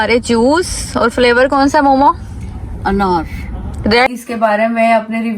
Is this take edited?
yes; 1 cut; at 4.1 s

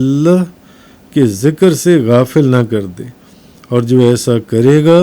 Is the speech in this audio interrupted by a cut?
no; 0 cuts

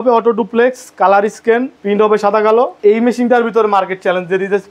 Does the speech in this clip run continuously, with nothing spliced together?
no; 1 cut; at 1.7 s

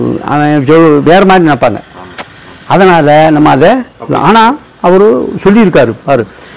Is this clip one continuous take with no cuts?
yes; 0 cuts

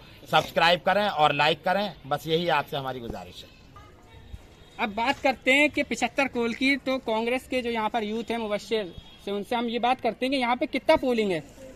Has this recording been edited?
no; 0 cuts

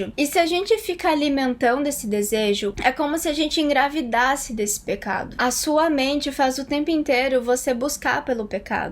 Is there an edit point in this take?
yes; 2 cuts; at 2.8 s, 5.4 s

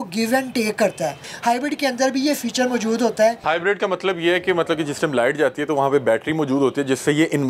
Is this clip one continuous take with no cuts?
no; 2 cuts; at 1.2 s, 3.4 s

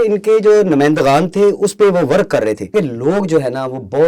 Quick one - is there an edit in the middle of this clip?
yes; 1 cut; at 2.7 s

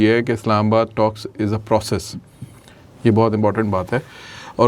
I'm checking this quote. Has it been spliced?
no; 0 cuts

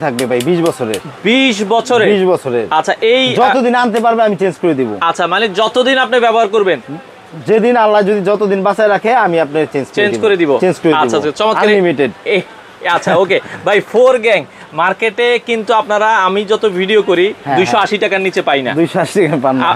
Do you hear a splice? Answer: no; 0 cuts

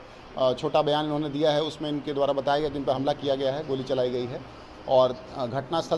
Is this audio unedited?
yes; 0 cuts

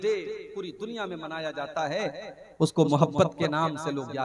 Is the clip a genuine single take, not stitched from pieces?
yes; 0 cuts

